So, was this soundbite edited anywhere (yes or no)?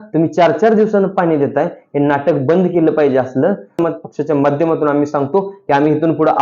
yes